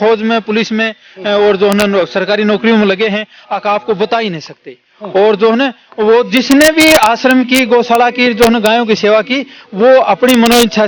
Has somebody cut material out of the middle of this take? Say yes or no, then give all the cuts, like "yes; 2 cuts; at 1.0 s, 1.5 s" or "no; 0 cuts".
no; 0 cuts